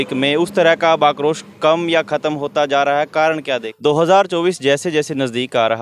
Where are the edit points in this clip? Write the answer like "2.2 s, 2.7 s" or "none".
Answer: 3.7 s